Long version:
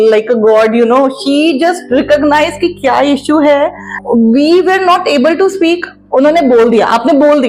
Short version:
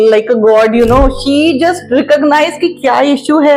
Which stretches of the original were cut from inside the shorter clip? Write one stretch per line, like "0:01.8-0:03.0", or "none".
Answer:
none